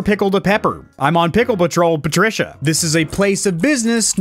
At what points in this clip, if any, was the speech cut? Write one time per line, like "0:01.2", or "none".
0:02.6